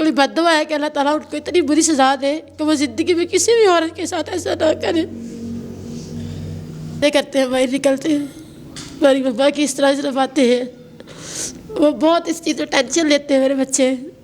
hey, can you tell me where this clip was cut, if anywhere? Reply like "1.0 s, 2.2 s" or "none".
7.0 s